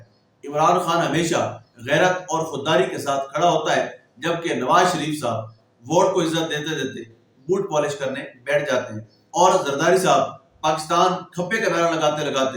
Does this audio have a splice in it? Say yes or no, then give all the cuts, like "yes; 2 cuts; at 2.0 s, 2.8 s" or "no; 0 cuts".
no; 0 cuts